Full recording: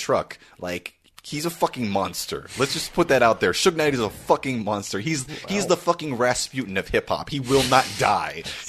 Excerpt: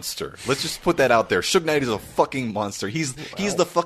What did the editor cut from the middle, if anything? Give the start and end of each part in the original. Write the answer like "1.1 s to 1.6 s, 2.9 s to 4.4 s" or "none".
none